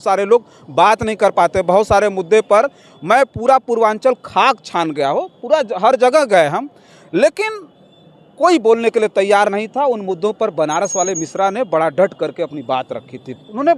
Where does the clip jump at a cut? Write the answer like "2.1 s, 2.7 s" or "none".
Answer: none